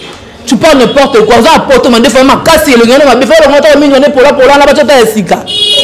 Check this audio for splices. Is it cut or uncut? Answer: uncut